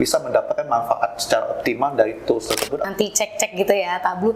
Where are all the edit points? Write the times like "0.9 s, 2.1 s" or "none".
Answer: 2.8 s